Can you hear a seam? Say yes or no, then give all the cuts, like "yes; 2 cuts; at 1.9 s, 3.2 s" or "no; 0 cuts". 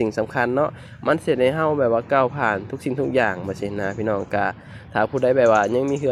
no; 0 cuts